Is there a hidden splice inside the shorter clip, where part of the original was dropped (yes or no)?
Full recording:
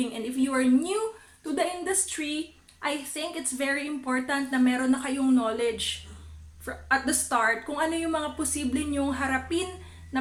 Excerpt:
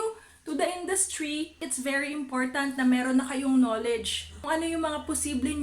yes